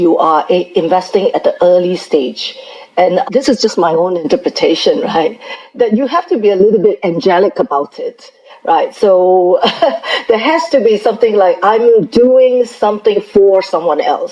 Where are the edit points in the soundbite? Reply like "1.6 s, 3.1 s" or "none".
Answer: 3.2 s